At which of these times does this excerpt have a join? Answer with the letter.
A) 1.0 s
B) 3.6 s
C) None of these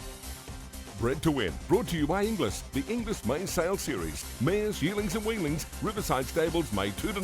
A